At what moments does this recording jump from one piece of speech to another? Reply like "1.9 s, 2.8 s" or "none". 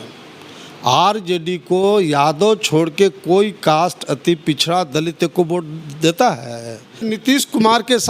7.1 s